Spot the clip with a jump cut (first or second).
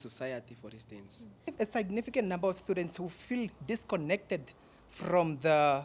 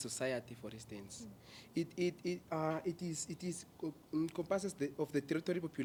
first